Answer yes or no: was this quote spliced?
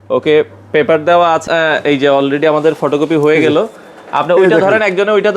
yes